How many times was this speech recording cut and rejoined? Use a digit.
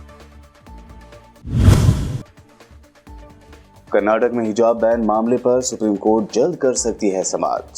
1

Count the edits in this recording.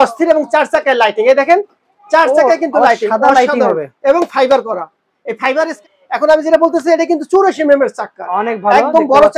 1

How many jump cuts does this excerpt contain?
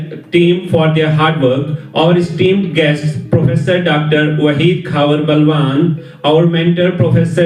0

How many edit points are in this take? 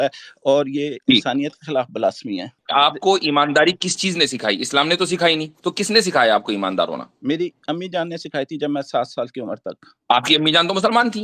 1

